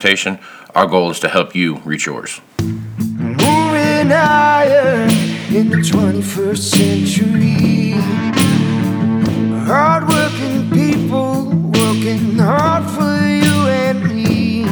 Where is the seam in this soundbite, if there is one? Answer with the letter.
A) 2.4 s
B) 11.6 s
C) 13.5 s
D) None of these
A